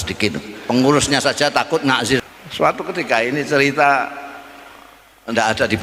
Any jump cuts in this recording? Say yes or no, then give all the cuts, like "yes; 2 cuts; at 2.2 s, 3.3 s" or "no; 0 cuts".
yes; 1 cut; at 2.2 s